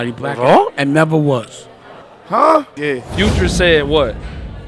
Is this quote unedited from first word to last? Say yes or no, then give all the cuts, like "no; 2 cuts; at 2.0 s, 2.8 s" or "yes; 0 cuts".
no; 1 cut; at 2.7 s